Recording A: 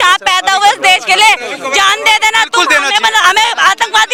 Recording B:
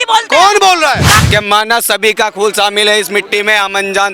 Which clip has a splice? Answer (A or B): B